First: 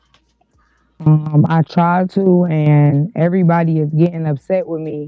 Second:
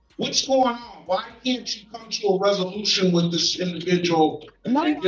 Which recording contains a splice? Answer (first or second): first